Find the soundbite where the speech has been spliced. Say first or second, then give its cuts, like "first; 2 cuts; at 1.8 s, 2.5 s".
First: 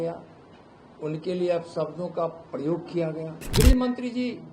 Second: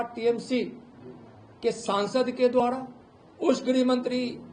first; 1 cut; at 3.5 s